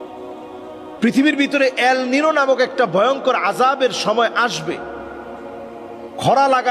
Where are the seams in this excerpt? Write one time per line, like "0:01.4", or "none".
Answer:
0:01.0